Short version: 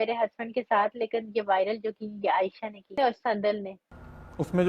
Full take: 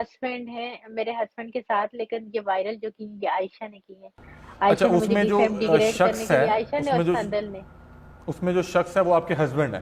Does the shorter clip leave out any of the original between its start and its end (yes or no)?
yes